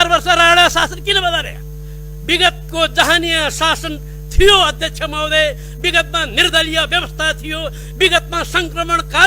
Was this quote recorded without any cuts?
yes; 0 cuts

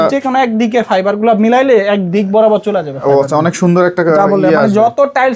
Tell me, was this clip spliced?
no; 0 cuts

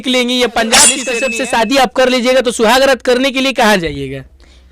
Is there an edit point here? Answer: yes; 1 cut; at 1.1 s

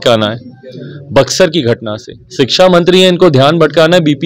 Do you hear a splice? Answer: no; 0 cuts

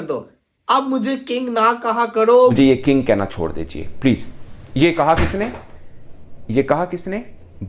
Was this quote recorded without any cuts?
no; 1 cut; at 2.5 s

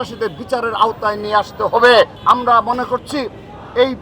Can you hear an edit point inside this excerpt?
yes; 1 cut; at 2.2 s

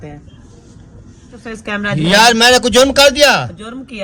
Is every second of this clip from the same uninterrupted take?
no; 1 cut; at 1.4 s

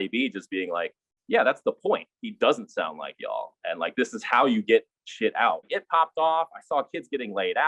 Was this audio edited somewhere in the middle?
yes; 1 cut; at 5.7 s

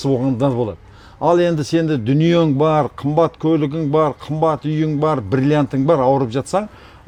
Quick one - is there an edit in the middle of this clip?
no; 0 cuts

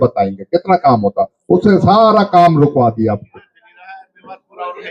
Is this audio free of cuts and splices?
yes; 0 cuts

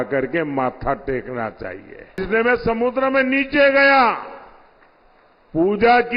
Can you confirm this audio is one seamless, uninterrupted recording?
no; 1 cut; at 2.2 s

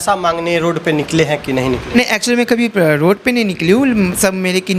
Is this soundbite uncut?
yes; 0 cuts

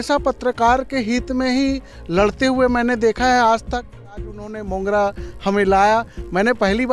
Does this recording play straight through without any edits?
no; 1 cut; at 4.2 s

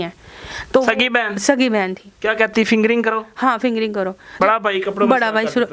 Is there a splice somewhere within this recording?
yes; 1 cut; at 4.4 s

